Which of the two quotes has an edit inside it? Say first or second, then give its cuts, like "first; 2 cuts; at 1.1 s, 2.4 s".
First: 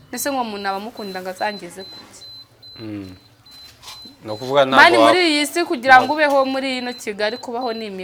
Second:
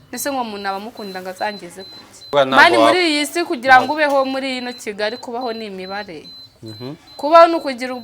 second; 1 cut; at 2.3 s